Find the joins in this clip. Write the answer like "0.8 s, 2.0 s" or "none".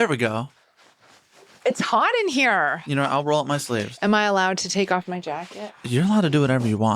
2.8 s